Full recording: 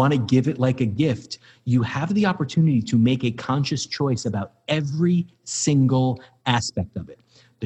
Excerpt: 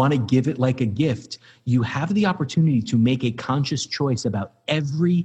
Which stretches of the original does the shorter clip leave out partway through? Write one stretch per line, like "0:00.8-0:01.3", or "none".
none